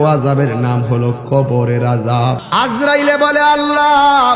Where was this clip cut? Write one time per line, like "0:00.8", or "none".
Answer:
0:02.4